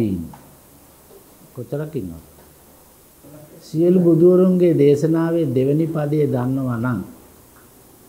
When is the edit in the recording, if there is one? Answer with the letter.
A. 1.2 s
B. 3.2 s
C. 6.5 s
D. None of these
B